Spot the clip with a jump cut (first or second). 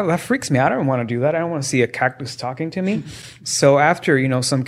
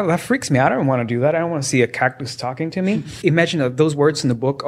second